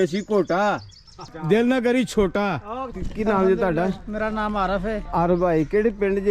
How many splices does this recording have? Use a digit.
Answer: 1